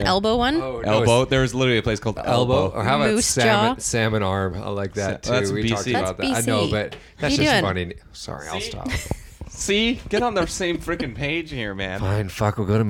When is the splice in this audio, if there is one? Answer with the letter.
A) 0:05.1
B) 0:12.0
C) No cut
B